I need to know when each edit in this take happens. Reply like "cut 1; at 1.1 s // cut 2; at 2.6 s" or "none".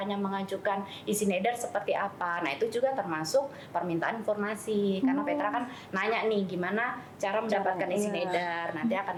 none